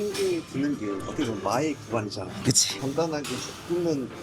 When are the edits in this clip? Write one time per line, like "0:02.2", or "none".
0:01.0
0:02.5